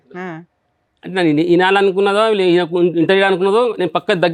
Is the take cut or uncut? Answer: uncut